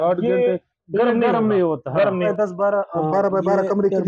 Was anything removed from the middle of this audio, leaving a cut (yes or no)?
yes